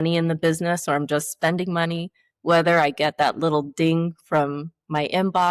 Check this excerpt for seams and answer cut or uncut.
uncut